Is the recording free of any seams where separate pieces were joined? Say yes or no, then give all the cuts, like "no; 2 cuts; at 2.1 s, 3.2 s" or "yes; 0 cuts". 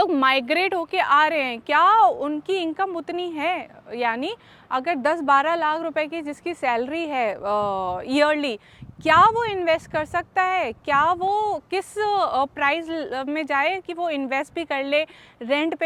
yes; 0 cuts